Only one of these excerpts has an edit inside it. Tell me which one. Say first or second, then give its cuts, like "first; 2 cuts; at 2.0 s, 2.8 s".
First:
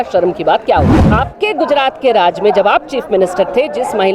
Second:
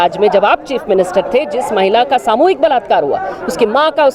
first; 1 cut; at 1.1 s